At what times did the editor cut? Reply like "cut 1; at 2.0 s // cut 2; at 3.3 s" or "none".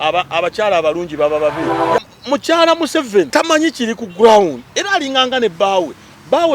cut 1; at 2.0 s // cut 2; at 3.3 s